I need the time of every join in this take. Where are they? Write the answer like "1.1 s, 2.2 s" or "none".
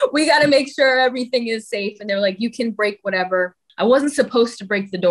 3.7 s